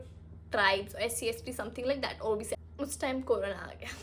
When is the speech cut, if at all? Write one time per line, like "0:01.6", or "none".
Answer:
0:02.5